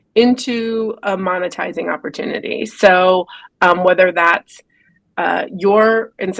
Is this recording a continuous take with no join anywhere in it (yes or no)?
yes